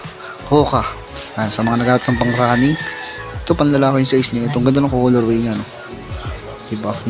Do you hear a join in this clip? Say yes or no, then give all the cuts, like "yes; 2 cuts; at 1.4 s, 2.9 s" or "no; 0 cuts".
no; 0 cuts